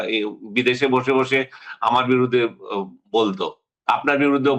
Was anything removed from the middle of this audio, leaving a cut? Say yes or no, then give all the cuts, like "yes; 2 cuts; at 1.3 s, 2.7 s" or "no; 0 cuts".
no; 0 cuts